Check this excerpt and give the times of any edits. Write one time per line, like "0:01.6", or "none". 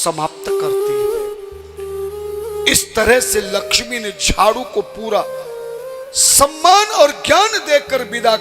none